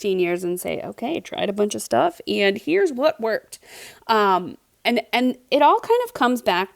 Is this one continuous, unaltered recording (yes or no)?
yes